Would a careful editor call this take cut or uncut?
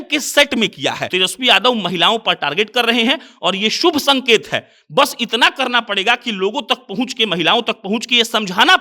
cut